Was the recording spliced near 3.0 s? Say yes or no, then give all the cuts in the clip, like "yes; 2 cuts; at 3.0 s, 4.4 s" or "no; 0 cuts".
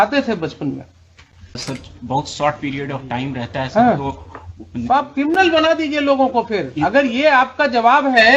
no; 1 cut; at 1.6 s